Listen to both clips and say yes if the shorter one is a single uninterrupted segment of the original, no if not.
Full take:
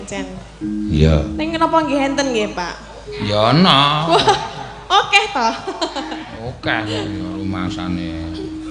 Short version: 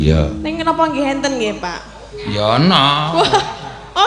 yes